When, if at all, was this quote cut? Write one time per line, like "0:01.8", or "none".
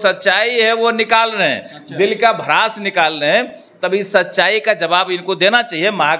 none